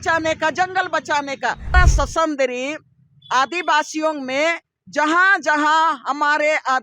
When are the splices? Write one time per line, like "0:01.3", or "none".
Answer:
0:01.7